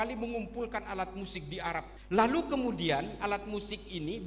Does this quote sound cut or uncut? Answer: cut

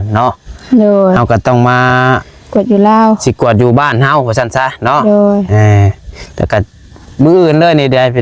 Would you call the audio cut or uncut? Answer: cut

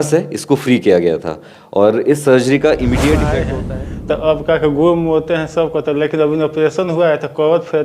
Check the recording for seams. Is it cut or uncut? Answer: cut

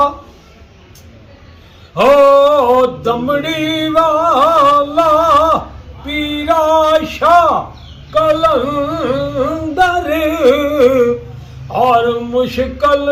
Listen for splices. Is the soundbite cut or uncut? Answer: uncut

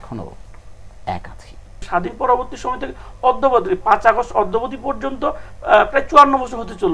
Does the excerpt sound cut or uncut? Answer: cut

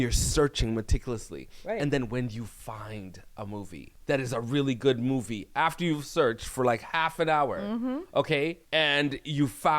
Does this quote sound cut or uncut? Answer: cut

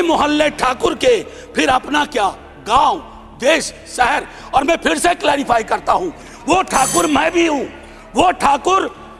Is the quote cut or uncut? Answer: uncut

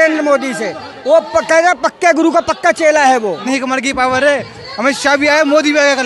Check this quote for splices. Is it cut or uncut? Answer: cut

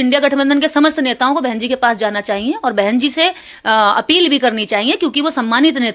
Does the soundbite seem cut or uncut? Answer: uncut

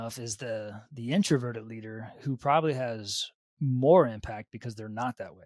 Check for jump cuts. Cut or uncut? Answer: uncut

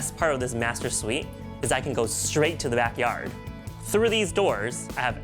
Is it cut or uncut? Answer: uncut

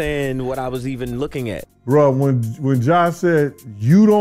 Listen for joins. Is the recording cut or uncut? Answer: cut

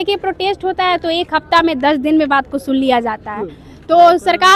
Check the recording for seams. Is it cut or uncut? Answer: uncut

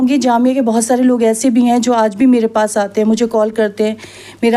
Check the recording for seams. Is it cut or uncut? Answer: uncut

